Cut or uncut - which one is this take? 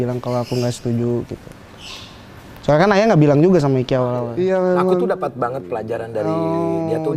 cut